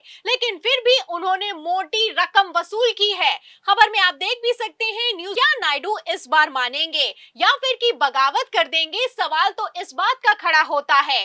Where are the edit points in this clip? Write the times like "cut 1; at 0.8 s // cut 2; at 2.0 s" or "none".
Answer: cut 1; at 5.3 s

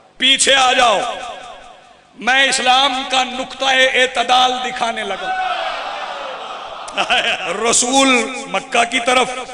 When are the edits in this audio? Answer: cut 1; at 7.4 s

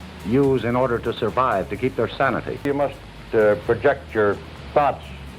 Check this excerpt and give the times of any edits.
cut 1; at 2.6 s

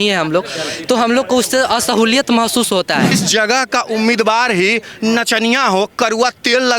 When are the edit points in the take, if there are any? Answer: cut 1; at 3.2 s

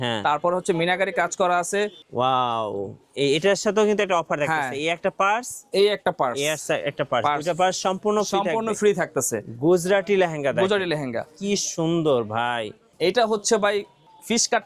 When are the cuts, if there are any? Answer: cut 1; at 2.0 s // cut 2; at 12.9 s

